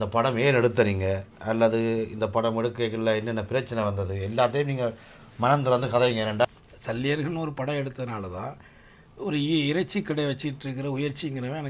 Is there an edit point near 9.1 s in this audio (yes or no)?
no